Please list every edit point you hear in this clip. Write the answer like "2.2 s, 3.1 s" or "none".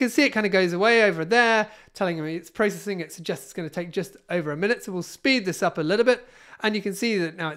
none